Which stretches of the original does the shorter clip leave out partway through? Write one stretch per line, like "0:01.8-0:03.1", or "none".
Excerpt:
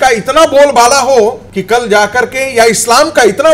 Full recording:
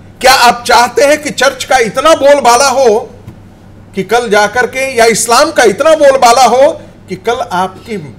0:03.2-0:03.9

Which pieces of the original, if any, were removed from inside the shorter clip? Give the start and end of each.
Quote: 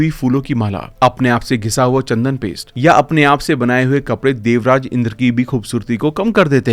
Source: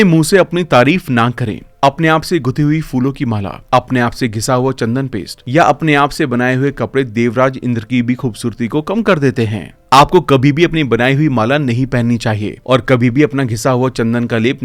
none

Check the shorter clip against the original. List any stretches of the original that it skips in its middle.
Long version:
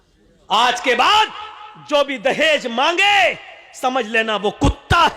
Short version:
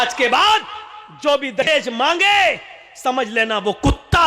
0:02.3-0:02.4

